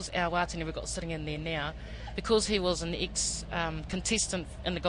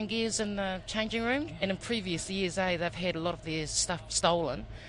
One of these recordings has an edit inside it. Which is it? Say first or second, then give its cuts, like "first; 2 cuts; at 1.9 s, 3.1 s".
second; 1 cut; at 1.5 s